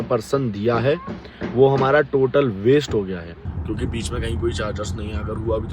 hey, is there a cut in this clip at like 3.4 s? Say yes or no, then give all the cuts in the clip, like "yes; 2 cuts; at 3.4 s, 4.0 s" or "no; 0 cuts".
yes; 1 cut; at 3.4 s